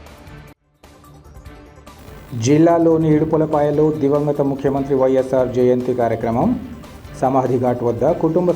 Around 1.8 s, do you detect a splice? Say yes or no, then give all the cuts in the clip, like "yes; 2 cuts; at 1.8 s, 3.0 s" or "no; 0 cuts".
yes; 1 cut; at 1.8 s